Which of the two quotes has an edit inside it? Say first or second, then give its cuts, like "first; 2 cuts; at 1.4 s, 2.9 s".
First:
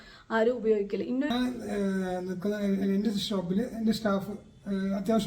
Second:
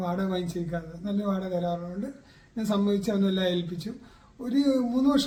first; 1 cut; at 1.3 s